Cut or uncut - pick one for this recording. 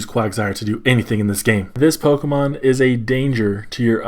cut